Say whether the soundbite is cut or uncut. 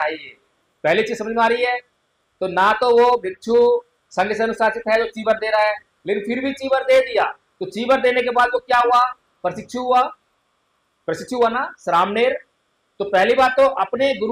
uncut